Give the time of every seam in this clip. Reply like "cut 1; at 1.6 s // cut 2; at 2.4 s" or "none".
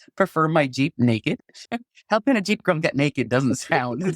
cut 1; at 1.6 s